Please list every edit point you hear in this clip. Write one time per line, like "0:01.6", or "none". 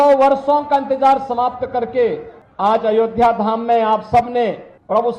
none